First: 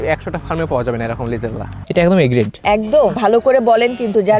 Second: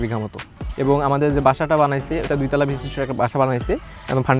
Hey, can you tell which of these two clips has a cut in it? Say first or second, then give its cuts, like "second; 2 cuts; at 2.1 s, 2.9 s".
first; 2 cuts; at 1.8 s, 3.1 s